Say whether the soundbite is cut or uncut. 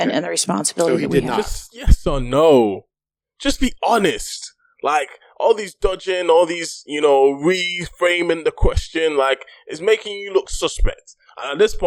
uncut